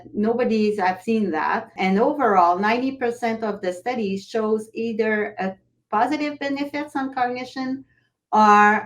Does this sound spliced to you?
yes; 1 cut; at 1.6 s

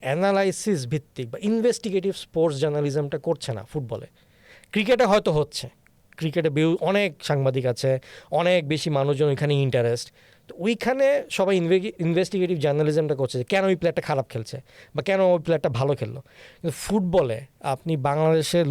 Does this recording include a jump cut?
no; 0 cuts

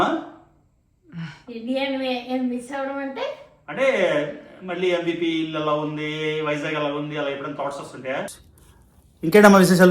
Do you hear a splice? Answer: yes; 1 cut; at 8.3 s

